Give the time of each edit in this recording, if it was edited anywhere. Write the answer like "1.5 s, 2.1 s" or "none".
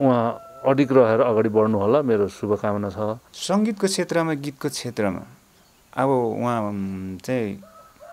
3.3 s